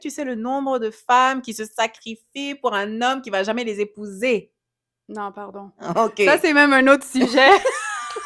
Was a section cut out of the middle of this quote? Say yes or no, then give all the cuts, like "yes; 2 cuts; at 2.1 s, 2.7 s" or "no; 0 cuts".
no; 0 cuts